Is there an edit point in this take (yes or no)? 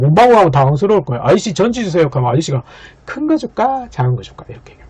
no